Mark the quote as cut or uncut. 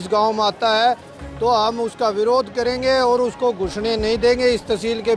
uncut